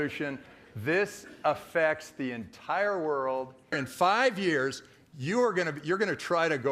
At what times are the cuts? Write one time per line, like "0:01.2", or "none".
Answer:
0:03.8